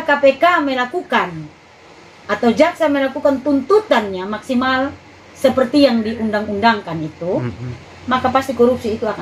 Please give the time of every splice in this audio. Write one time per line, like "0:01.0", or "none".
none